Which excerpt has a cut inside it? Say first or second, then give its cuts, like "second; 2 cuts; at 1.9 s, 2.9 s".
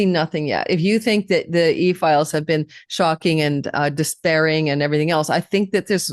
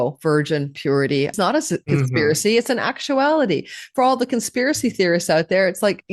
second; 1 cut; at 1.3 s